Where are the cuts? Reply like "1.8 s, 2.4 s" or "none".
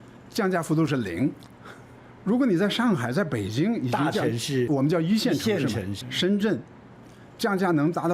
4.7 s, 5.9 s